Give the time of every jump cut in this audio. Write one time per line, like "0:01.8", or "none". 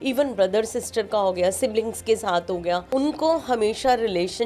0:02.9